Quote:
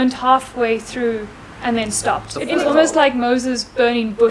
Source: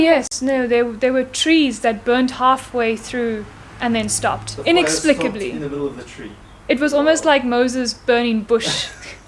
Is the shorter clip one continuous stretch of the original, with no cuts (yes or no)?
no